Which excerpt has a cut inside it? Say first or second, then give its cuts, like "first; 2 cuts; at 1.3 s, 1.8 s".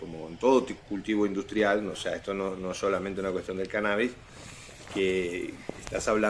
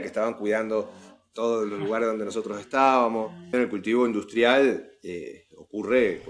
second; 1 cut; at 3.5 s